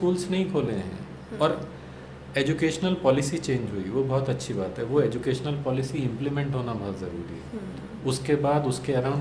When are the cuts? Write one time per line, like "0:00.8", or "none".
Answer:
none